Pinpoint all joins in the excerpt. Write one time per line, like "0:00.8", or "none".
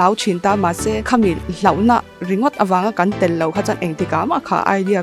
0:01.0

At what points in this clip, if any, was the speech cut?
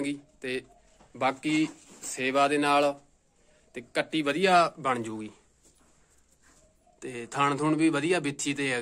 none

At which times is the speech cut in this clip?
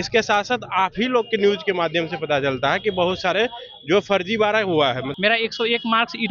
0:05.1

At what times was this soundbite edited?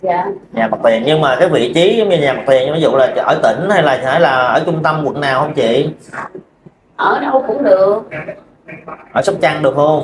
none

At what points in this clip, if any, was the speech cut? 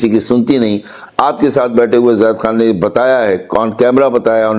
none

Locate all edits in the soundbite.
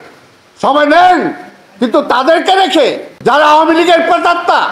0:03.1

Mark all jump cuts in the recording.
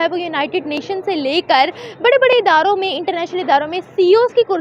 none

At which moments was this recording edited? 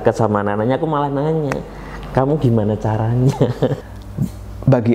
0:03.8

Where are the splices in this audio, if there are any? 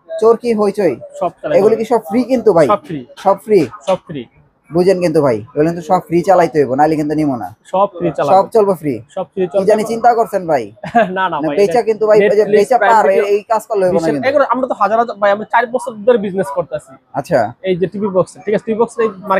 none

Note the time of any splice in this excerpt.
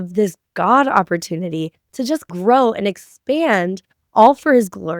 0:02.3

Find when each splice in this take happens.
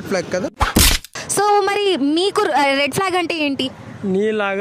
0:01.2

